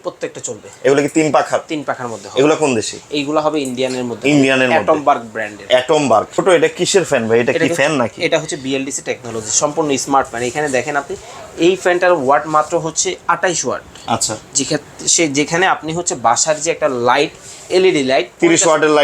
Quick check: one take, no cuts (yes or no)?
no